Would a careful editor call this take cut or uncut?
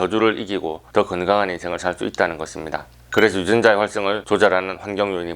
cut